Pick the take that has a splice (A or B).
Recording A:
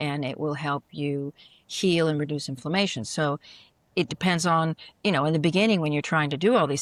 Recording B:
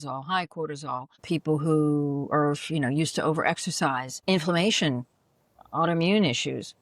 B